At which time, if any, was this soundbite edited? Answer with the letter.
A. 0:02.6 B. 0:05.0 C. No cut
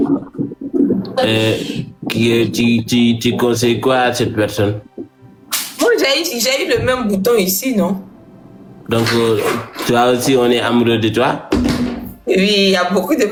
C